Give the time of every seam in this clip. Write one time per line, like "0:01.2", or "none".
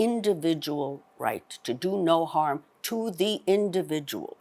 none